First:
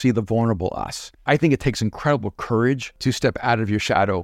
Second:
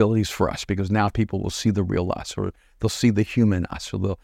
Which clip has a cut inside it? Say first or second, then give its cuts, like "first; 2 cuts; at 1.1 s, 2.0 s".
first; 2 cuts; at 1.2 s, 2.9 s